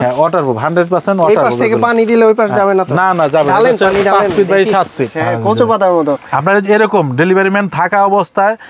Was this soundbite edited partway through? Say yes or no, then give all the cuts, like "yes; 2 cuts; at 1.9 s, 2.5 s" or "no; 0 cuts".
yes; 1 cut; at 5.2 s